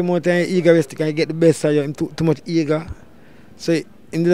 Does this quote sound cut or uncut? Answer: uncut